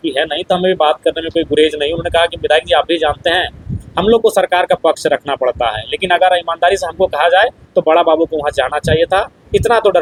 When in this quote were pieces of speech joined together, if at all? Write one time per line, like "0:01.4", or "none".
none